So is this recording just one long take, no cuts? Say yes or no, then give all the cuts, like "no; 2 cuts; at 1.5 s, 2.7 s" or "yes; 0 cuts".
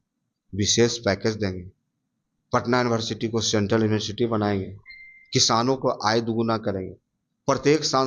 yes; 0 cuts